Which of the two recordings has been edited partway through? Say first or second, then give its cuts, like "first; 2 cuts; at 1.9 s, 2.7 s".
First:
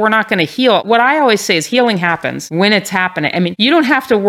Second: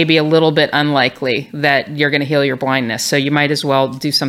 first; 3 cuts; at 0.8 s, 2.4 s, 3.5 s